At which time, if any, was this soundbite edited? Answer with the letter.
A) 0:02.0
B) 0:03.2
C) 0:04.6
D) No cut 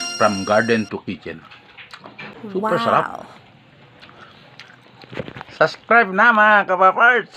A